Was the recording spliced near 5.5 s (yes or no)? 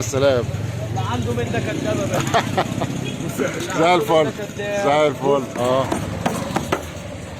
yes